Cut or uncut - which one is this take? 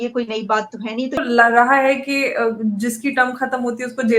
cut